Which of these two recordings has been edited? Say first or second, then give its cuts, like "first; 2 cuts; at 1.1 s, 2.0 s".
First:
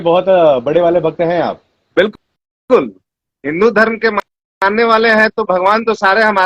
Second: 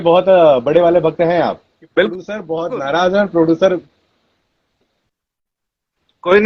second; 1 cut; at 2.5 s